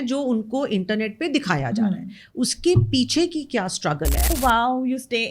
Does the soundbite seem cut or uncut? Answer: cut